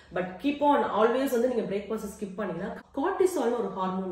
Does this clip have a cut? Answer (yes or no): yes